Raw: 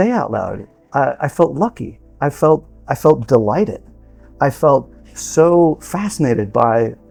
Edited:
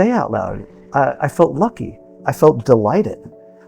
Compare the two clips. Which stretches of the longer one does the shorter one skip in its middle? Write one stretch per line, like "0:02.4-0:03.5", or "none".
0:02.1-0:02.7